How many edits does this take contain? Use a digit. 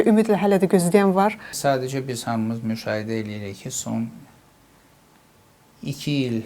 1